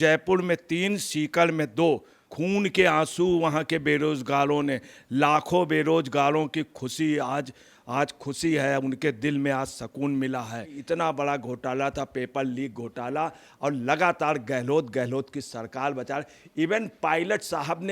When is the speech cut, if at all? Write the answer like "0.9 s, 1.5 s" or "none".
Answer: 2.2 s, 10.8 s